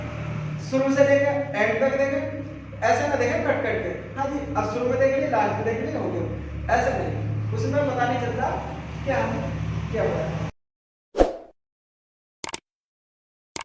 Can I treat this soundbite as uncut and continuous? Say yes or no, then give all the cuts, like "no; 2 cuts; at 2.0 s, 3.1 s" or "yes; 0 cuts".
no; 1 cut; at 10.5 s